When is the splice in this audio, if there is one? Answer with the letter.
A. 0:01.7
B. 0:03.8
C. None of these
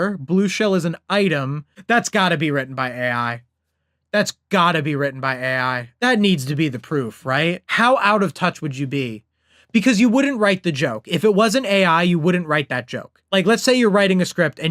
A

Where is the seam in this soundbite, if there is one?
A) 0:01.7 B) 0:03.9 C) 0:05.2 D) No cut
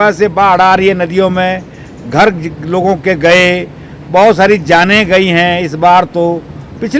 D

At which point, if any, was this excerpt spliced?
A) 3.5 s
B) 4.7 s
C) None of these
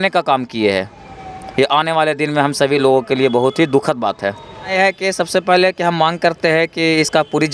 B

